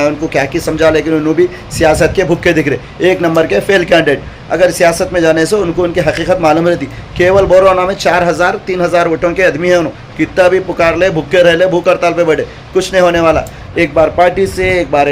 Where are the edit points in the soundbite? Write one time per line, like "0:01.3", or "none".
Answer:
0:13.6